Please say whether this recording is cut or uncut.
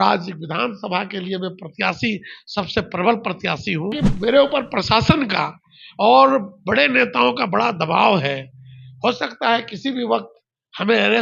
cut